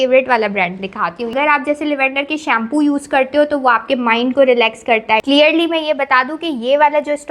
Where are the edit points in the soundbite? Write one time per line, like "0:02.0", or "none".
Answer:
0:01.3
0:05.2